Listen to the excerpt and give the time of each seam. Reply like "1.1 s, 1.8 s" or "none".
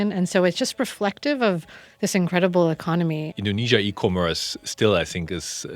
3.3 s

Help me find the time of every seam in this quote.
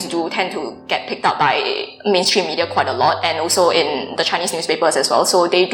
none

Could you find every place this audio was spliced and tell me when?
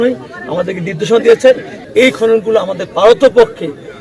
1.8 s

